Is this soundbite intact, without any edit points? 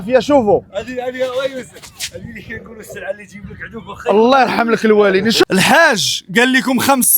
no; 1 cut; at 5.4 s

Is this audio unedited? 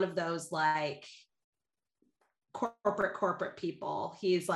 yes; 0 cuts

